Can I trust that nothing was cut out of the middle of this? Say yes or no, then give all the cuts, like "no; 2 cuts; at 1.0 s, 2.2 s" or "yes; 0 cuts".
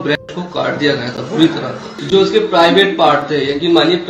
no; 1 cut; at 1.9 s